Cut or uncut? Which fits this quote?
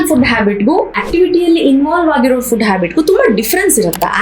cut